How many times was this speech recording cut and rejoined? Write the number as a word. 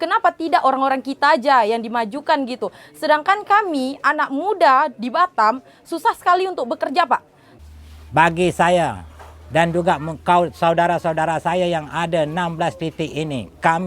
one